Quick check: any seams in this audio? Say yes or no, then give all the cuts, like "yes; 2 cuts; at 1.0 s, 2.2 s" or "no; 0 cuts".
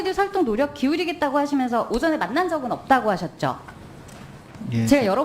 no; 0 cuts